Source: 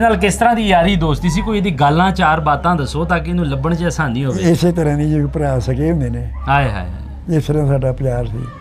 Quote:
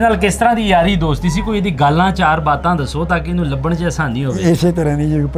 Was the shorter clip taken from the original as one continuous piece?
yes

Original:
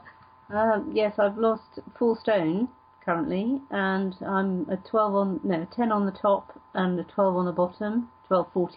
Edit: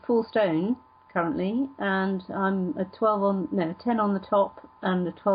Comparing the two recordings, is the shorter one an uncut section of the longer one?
yes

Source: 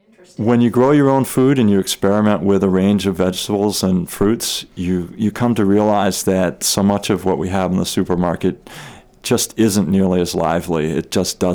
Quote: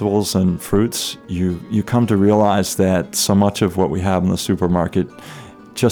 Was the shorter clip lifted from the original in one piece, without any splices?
yes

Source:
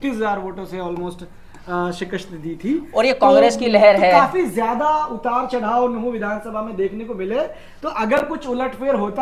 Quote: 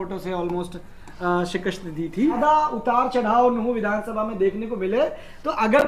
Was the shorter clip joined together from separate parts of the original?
yes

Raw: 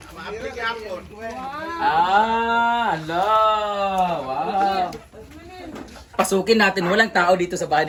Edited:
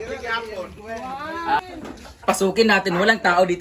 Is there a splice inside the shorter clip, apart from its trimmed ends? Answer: yes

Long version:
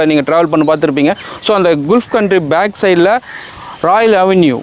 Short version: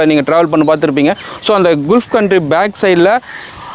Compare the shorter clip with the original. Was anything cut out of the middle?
no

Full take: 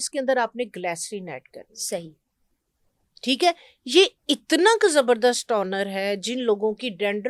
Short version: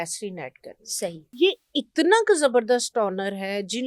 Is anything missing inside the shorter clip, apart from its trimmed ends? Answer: yes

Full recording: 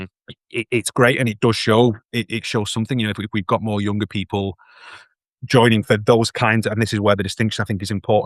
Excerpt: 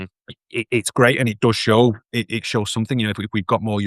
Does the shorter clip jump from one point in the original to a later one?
no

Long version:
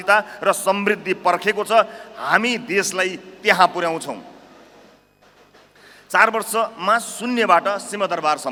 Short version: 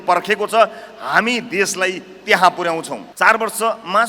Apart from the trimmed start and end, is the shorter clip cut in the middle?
yes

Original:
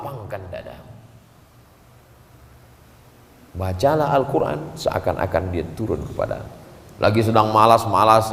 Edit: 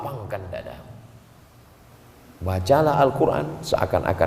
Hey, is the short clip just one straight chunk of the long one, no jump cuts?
no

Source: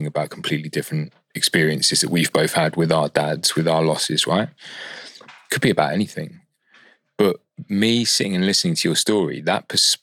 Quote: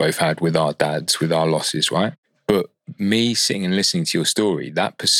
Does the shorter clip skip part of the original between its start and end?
yes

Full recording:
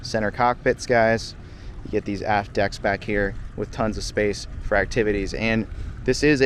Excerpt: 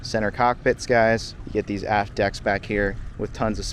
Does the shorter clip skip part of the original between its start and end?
yes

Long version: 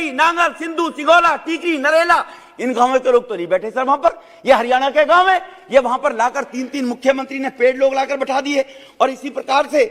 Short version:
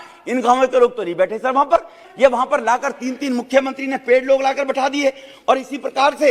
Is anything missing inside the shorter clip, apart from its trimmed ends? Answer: yes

